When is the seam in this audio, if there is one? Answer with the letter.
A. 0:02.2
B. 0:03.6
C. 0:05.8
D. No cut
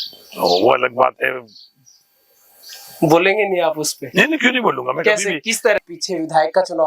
C